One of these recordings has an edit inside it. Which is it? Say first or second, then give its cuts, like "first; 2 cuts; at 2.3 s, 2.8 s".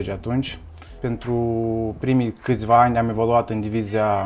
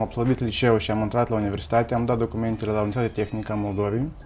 second; 1 cut; at 3.3 s